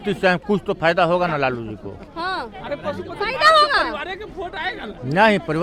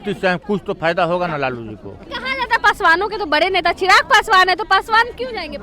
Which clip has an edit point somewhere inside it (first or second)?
second